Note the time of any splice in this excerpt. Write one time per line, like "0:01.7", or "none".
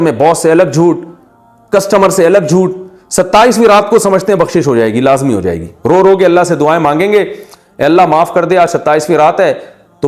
none